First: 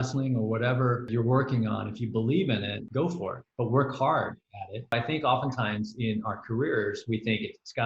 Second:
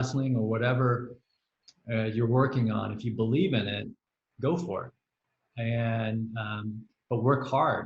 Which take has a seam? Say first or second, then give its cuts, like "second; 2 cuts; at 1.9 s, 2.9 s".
first; 3 cuts; at 1.1 s, 3.2 s, 4.9 s